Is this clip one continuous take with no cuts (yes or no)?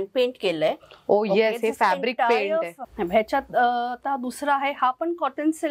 no